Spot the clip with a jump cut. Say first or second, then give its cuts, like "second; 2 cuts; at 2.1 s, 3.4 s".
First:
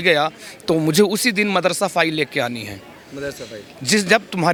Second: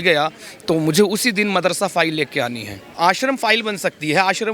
second; 1 cut; at 3.0 s